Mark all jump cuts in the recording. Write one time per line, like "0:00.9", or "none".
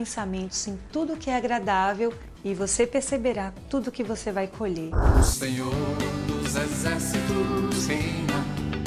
0:05.0